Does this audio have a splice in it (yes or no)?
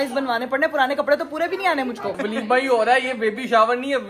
yes